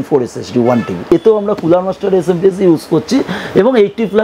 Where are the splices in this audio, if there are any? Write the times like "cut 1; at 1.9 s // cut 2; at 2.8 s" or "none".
cut 1; at 1.0 s